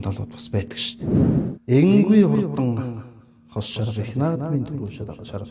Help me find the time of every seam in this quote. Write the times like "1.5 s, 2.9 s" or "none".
1.4 s